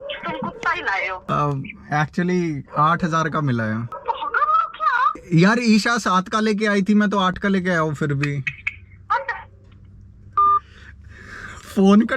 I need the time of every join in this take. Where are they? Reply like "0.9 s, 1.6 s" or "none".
1.2 s, 3.9 s, 5.2 s